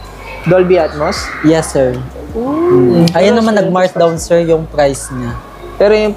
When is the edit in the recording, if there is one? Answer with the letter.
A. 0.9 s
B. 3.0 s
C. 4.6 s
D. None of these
B